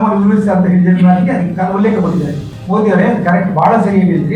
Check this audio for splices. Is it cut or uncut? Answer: cut